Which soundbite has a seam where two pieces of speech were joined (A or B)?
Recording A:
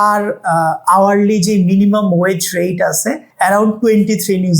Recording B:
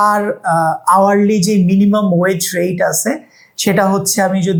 A